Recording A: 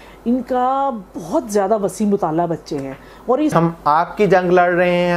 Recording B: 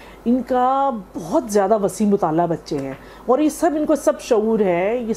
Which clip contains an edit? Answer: A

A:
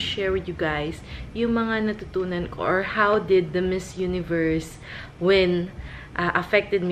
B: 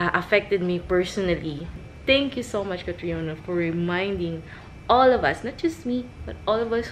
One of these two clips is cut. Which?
B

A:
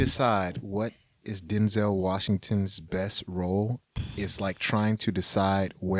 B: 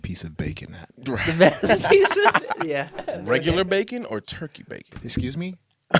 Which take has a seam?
B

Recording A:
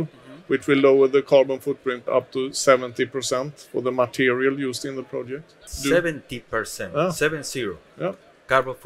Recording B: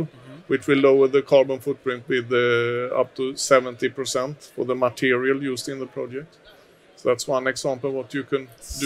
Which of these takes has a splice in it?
A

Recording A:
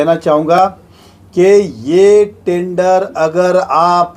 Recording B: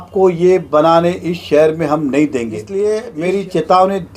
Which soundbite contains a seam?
B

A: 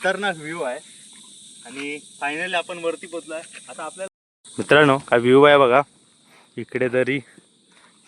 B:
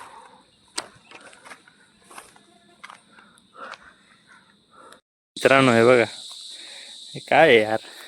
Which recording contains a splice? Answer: A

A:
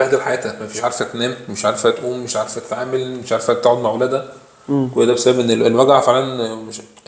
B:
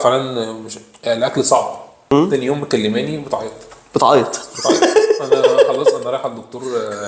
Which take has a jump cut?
B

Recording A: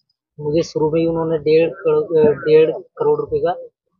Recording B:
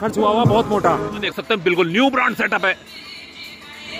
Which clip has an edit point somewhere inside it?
B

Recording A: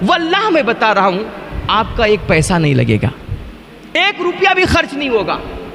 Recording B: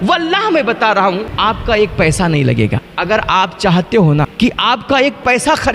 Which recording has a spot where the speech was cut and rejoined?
B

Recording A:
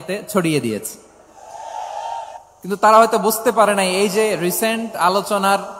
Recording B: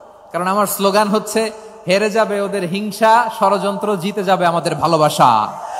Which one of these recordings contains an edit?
A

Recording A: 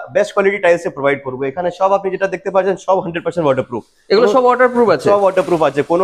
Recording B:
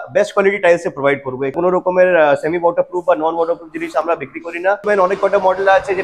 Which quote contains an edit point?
B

